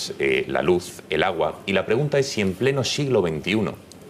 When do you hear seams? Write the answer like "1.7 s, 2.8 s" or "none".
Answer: none